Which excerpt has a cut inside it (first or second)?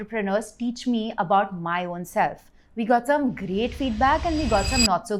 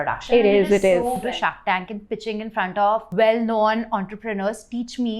second